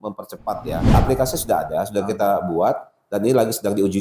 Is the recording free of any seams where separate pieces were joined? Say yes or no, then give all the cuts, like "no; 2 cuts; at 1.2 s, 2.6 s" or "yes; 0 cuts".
no; 1 cut; at 0.9 s